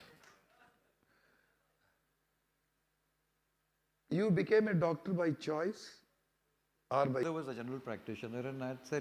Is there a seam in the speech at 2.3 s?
no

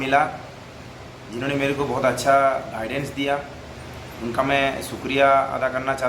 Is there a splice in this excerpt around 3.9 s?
no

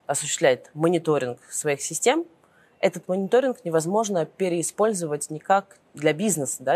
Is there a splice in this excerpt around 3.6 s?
no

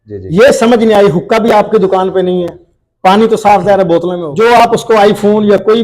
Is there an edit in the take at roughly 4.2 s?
yes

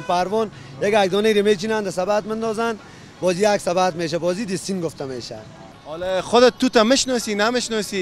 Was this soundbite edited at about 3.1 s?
no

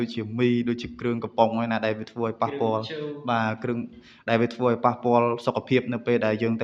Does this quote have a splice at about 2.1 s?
no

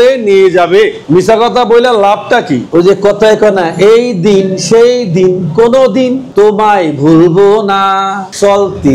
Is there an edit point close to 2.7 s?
yes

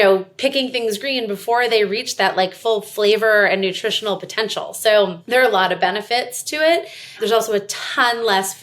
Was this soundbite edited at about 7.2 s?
yes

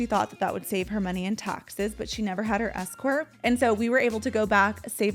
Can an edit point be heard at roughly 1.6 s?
no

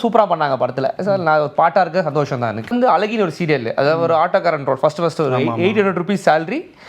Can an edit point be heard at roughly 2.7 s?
yes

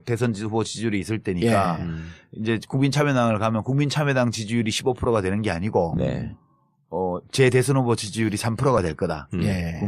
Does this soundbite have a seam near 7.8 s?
no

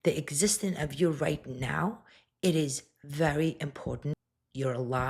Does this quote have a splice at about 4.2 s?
yes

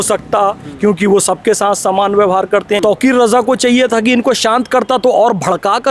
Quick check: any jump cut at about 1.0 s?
no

